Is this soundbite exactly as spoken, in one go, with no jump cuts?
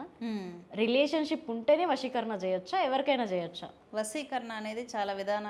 yes; 0 cuts

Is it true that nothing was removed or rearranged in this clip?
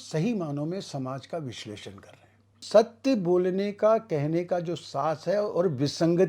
no; 1 cut; at 2.6 s

